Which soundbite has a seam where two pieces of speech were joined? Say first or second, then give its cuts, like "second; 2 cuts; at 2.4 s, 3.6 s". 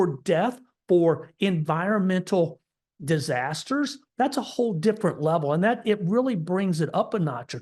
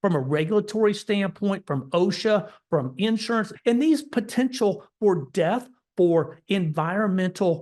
second; 1 cut; at 3.5 s